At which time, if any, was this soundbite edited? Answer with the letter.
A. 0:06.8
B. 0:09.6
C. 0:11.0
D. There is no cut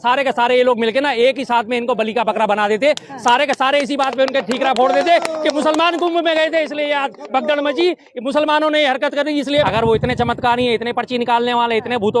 B